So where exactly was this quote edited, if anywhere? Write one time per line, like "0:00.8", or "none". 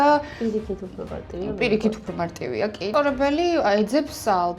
0:02.9